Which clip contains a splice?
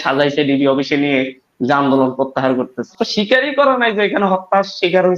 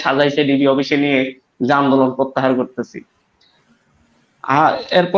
first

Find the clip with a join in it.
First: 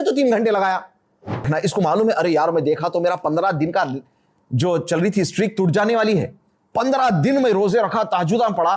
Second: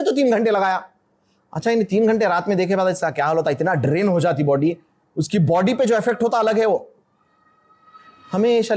first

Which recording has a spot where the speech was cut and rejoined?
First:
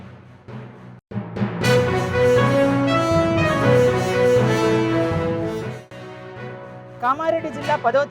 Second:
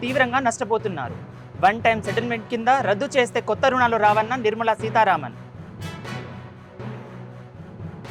first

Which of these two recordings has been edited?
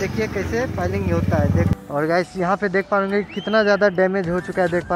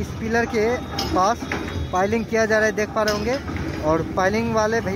first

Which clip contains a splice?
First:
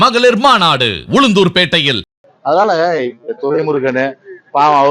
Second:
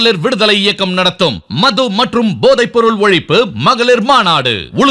first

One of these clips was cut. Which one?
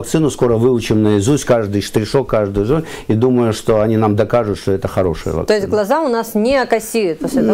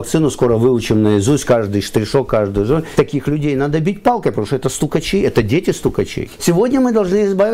second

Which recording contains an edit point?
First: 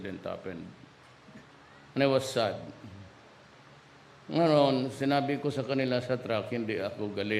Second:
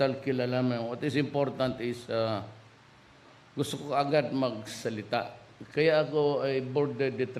second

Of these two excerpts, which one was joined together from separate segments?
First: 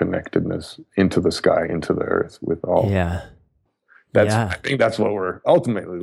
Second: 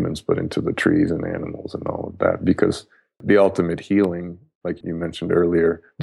second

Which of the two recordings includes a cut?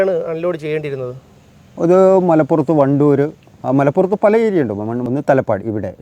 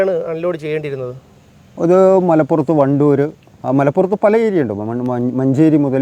first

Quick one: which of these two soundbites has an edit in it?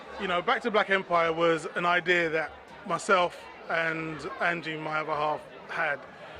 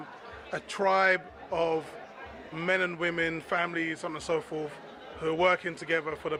first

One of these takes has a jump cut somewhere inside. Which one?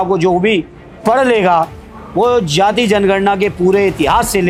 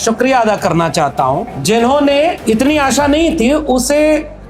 second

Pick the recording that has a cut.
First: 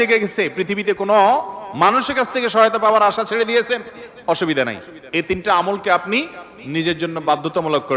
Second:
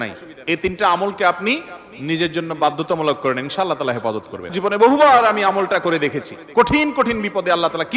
second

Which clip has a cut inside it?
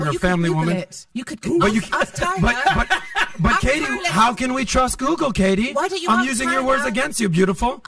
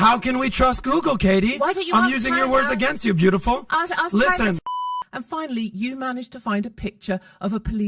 second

